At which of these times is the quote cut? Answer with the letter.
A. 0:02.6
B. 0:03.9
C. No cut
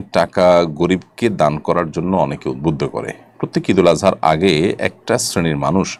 C